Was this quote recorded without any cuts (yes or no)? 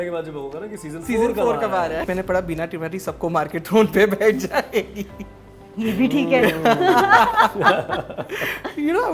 no